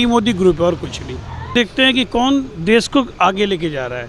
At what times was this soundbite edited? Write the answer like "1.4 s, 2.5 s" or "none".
1.5 s